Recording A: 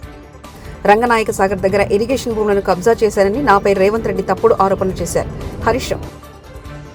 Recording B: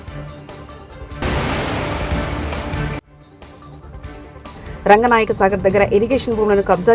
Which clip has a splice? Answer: B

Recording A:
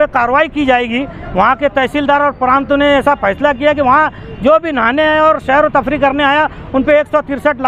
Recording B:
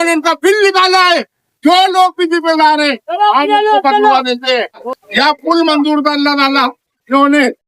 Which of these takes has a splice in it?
B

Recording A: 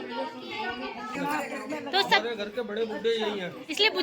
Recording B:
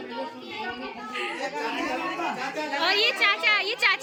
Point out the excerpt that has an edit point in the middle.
A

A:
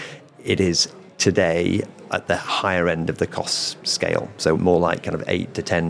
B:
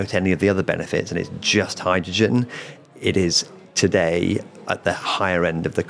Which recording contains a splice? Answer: A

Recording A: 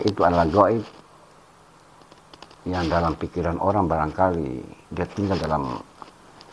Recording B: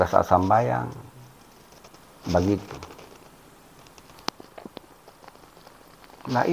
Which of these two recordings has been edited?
B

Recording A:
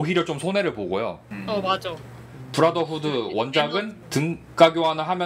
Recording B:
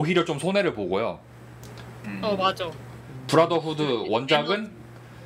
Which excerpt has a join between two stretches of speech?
A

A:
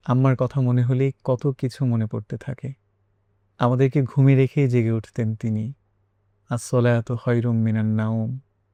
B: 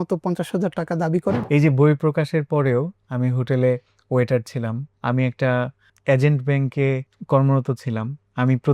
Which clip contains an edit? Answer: B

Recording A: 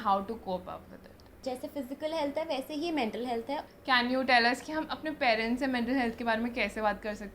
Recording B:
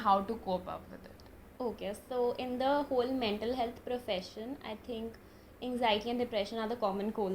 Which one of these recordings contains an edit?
A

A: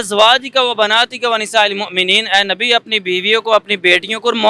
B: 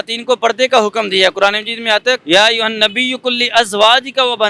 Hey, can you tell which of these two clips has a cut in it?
B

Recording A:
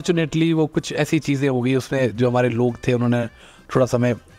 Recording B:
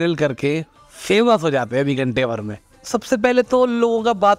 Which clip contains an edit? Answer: B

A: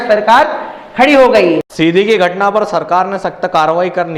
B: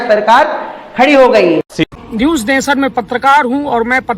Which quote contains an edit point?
B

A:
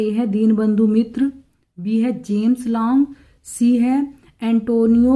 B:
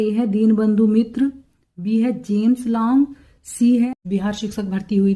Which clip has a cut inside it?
B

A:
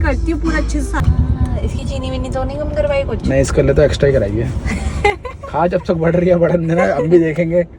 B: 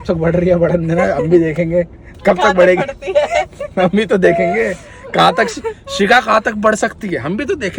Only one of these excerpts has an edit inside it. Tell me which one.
A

